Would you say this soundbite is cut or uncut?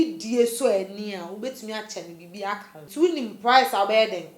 cut